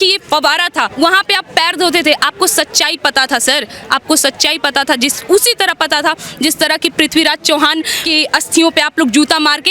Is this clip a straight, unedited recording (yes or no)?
no